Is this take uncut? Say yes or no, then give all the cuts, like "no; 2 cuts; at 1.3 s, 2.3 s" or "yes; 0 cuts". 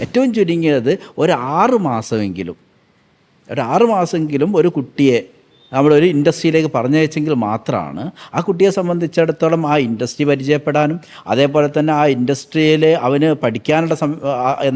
yes; 0 cuts